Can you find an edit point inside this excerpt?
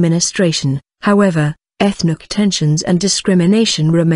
yes; 1 cut; at 2.7 s

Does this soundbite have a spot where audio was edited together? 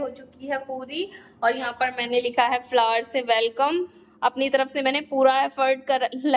no; 0 cuts

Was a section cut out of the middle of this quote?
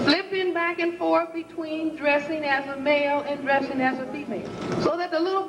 yes; 1 cut; at 4.6 s

